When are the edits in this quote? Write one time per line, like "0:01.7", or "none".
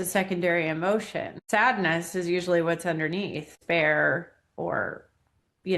0:01.3
0:03.6